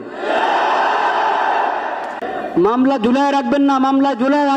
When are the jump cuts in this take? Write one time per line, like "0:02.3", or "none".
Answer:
0:02.2